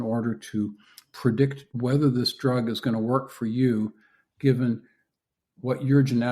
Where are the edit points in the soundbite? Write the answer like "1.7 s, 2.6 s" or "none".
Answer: 1.6 s